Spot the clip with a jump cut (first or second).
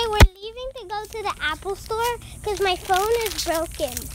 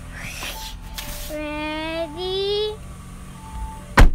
first